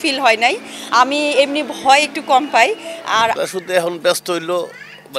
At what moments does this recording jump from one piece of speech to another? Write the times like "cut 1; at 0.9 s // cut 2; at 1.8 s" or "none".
cut 1; at 3.4 s